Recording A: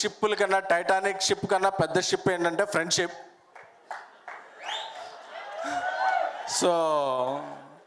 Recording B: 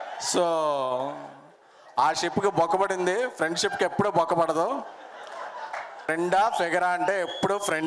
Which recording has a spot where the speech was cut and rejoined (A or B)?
B